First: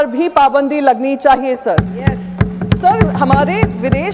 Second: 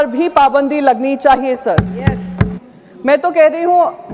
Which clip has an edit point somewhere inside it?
second; 1 cut; at 2.6 s

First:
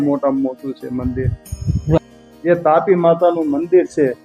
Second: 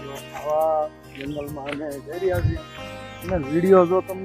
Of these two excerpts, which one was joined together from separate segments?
first; 1 cut; at 2.0 s

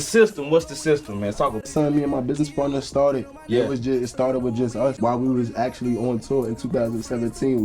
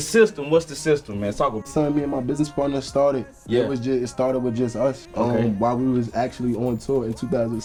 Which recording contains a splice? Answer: first; 1 cut; at 5.0 s

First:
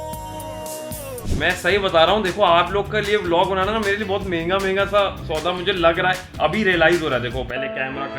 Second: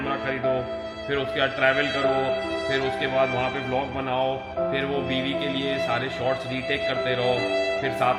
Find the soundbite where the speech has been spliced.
first; 1 cut; at 1.1 s

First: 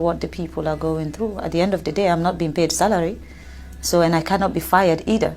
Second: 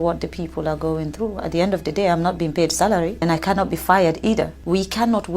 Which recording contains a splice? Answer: second; 2 cuts; at 3.2 s, 4.6 s

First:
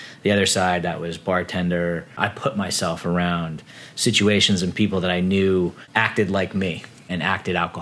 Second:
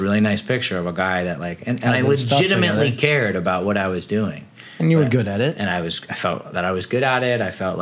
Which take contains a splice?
first; 3 cuts; at 2.1 s, 5.8 s, 7.0 s

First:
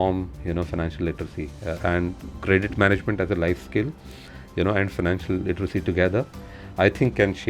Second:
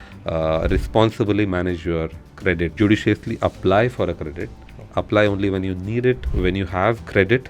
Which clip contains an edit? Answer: second; 2 cuts; at 2.7 s, 6.3 s

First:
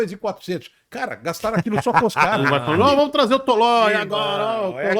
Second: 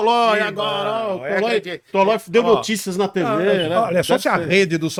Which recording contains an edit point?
first; 1 cut; at 2.4 s

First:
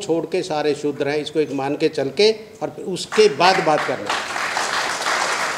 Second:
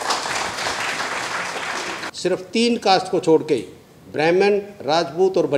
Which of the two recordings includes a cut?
second; 1 cut; at 2.0 s

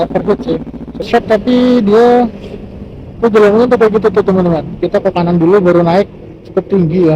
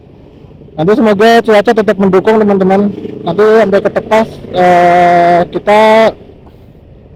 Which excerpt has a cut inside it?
first; 1 cut; at 1.1 s

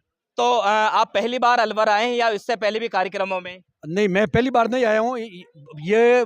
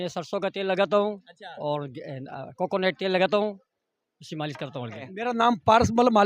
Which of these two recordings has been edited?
second; 1 cut; at 5.2 s

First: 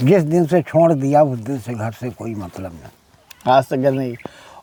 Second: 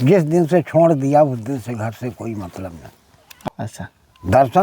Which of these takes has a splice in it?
second; 1 cut; at 3.5 s

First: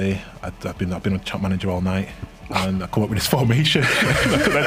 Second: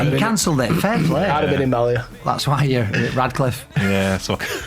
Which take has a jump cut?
second; 1 cut; at 2.2 s

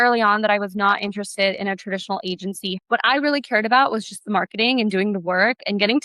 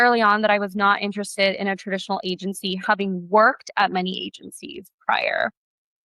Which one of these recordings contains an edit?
first; 1 cut; at 2.8 s

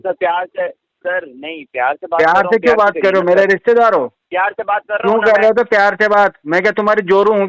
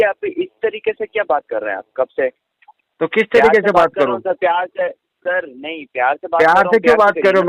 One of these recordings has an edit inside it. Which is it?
first; 1 cut; at 4.2 s

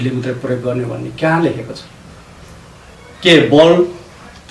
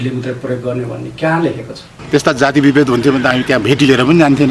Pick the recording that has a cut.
second; 1 cut; at 1.9 s

